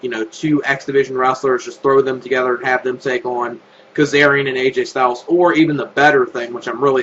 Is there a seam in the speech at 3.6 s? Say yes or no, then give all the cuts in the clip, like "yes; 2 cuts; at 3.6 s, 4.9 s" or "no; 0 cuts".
no; 1 cut; at 1.7 s